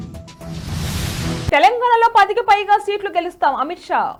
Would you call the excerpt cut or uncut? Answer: uncut